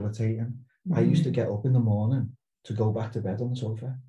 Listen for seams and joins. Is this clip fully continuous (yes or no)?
yes